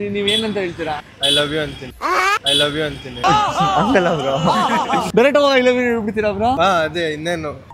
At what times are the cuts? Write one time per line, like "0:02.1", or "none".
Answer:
none